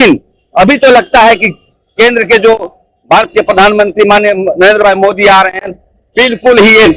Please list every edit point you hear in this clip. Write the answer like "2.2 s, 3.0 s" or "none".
none